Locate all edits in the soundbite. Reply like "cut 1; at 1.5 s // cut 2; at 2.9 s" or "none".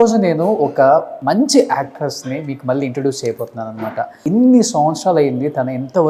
cut 1; at 1.1 s // cut 2; at 4.2 s